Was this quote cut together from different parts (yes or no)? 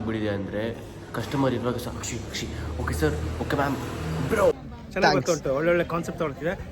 yes